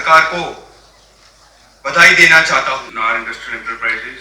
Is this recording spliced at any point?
yes; 1 cut; at 2.9 s

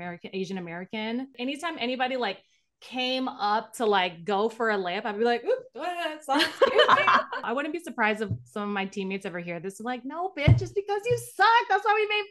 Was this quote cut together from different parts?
yes; 2 cuts; at 1.3 s, 7.4 s

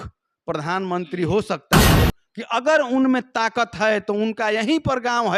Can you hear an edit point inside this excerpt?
yes; 1 cut; at 2.0 s

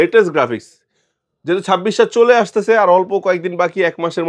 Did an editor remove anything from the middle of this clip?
no; 0 cuts

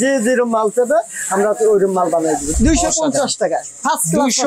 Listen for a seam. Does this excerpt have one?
yes; 1 cut; at 2.5 s

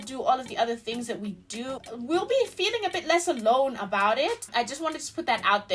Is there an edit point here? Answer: yes; 2 cuts; at 1.8 s, 4.5 s

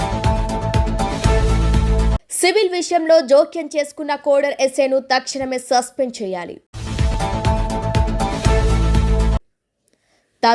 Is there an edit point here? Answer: yes; 1 cut; at 2.2 s

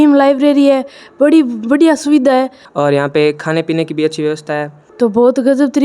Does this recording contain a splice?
yes; 2 cuts; at 2.6 s, 4.8 s

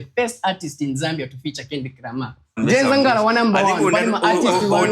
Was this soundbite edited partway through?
yes; 1 cut; at 2.6 s

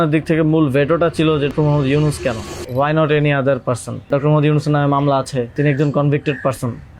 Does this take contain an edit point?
yes; 4 cuts; at 1.5 s, 2.5 s, 4.1 s, 5.5 s

